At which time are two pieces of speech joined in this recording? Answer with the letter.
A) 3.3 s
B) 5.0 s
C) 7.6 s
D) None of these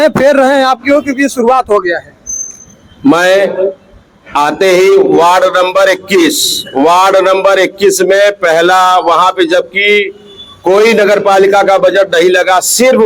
D